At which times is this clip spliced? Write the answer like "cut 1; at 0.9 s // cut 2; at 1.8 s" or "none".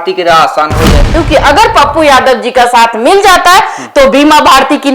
cut 1; at 1.1 s